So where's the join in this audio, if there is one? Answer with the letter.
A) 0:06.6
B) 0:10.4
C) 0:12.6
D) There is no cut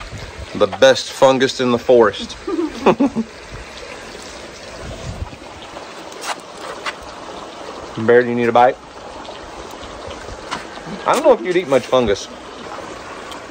C